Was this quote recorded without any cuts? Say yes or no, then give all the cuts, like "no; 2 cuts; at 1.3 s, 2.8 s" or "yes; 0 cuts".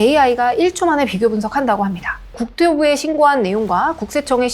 no; 1 cut; at 2.4 s